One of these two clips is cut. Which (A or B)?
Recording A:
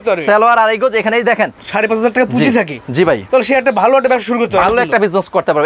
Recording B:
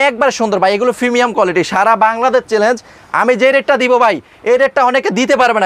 A